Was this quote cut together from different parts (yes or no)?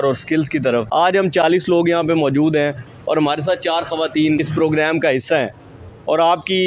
yes